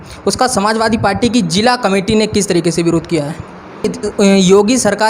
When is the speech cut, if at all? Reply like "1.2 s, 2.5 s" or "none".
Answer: 3.9 s